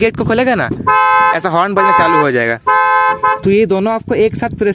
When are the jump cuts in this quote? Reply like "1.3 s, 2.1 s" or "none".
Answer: 3.4 s

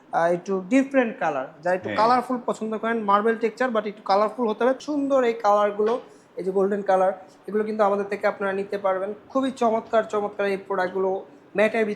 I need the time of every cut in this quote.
4.8 s

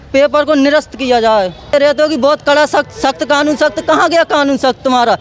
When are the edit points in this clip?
1.7 s

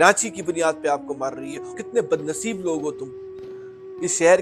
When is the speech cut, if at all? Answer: 1.8 s

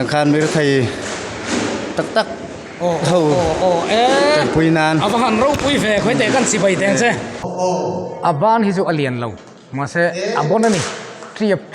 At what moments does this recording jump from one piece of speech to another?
7.4 s

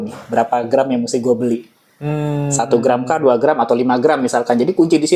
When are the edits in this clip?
none

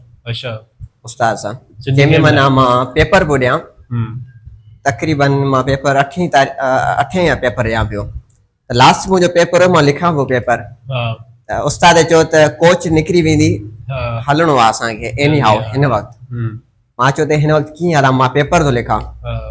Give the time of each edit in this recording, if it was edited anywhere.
none

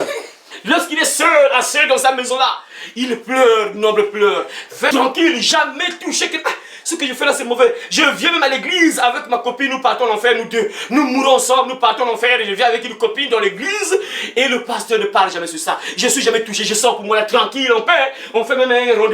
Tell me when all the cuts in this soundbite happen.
4.9 s

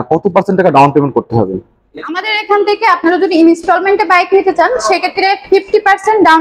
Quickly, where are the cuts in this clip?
none

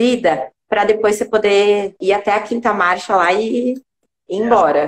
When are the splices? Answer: 2.0 s

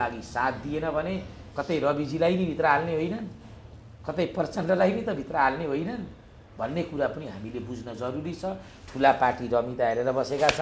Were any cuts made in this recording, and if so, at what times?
none

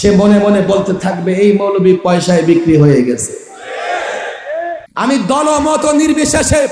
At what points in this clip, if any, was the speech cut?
4.8 s

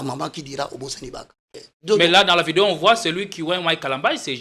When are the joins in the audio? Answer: 1.6 s

